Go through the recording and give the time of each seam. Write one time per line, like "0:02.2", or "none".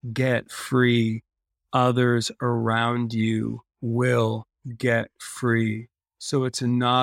none